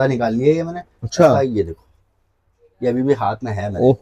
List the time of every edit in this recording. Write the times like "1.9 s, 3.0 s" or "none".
none